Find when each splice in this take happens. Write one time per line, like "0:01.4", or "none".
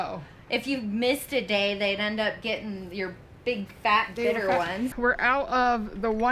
0:04.9